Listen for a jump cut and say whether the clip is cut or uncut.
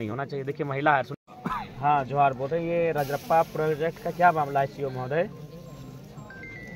cut